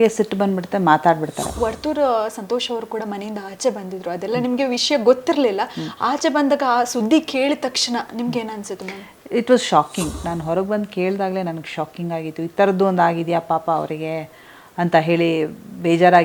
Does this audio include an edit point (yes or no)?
yes